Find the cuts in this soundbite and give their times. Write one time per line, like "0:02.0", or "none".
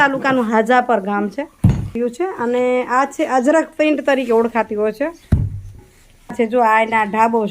0:02.0
0:06.3